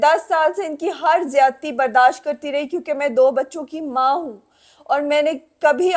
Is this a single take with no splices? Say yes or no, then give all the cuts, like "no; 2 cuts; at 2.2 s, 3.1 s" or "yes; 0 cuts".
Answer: yes; 0 cuts